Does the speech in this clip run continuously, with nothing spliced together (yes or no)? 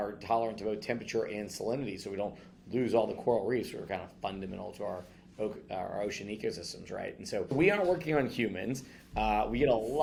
yes